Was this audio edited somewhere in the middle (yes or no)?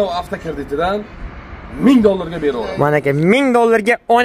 no